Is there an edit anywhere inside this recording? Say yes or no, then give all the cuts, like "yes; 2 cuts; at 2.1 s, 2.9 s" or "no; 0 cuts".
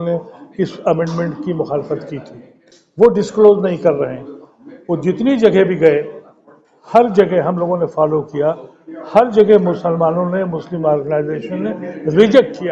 no; 0 cuts